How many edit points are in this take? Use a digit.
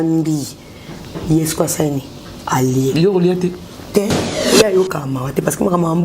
1